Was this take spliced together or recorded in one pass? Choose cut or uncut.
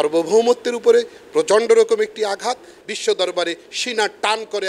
cut